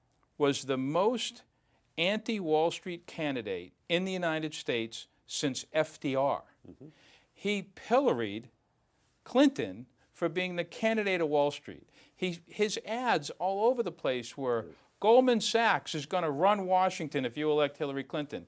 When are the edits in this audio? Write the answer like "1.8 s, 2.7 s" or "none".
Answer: none